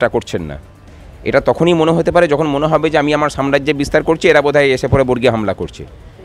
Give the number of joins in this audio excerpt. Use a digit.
0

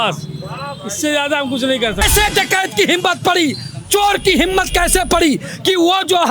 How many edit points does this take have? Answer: 1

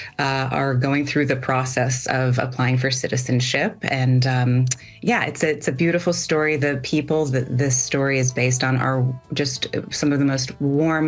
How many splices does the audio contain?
0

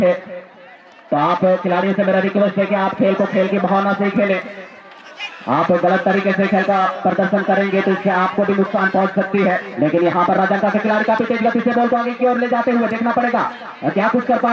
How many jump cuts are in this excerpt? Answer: 0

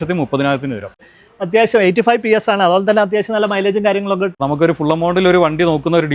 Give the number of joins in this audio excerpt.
2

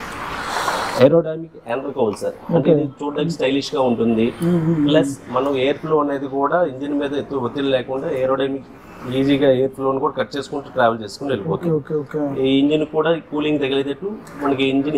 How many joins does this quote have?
0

